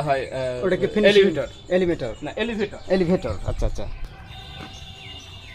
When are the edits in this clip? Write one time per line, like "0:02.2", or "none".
none